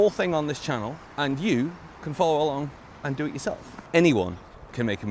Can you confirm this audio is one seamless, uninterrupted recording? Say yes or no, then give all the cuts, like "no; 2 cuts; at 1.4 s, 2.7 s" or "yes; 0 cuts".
no; 2 cuts; at 1.0 s, 3.7 s